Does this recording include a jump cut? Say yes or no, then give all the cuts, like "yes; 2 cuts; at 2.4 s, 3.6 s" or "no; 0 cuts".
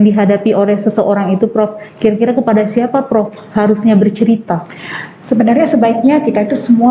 no; 0 cuts